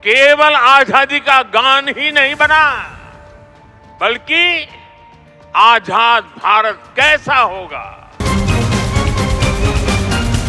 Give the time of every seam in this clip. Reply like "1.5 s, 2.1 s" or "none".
8.2 s